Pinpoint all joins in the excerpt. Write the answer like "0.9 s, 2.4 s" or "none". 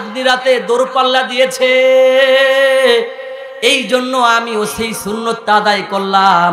none